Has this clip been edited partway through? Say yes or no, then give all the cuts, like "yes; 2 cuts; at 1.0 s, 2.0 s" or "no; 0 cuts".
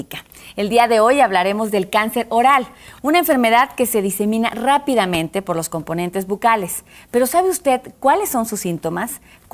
no; 0 cuts